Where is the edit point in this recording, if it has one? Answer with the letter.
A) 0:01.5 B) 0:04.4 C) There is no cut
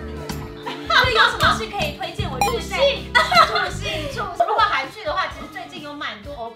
B